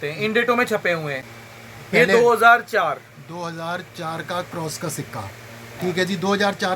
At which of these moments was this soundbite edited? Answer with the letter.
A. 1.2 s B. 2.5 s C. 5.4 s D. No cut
A